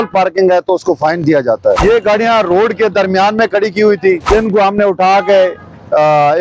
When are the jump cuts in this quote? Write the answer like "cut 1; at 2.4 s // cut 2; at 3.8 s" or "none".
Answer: cut 1; at 1.8 s // cut 2; at 4.2 s